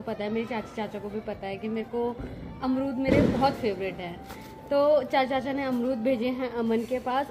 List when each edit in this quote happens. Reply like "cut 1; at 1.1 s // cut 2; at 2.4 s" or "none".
none